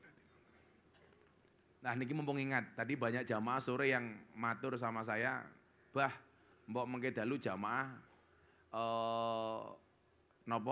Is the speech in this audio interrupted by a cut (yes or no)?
no